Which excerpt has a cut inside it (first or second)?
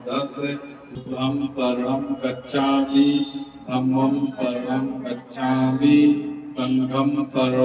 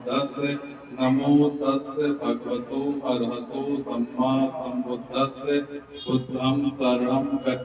first